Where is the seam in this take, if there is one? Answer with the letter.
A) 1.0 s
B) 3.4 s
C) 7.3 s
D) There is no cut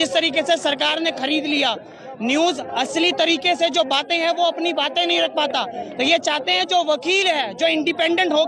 D